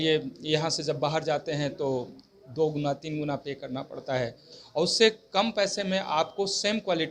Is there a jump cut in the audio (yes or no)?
no